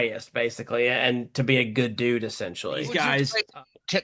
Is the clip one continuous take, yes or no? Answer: no